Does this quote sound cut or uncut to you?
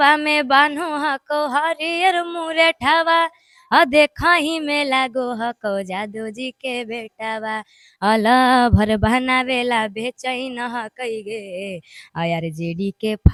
uncut